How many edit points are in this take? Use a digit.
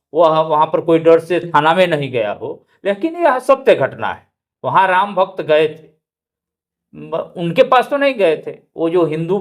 0